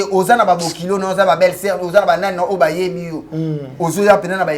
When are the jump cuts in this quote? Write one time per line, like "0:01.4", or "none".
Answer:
none